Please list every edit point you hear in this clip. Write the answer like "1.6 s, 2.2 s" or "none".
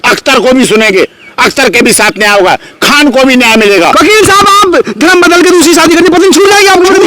3.9 s